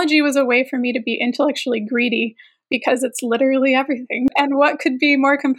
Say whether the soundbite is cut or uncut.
cut